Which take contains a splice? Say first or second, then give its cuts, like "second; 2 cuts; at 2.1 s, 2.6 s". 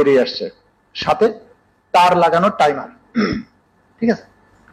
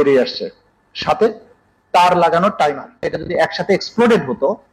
second; 1 cut; at 3.1 s